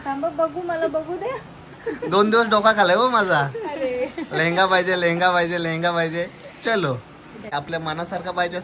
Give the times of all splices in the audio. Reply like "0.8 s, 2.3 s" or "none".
7.5 s